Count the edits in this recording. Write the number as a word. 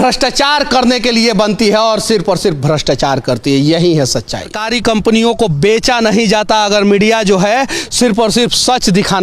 one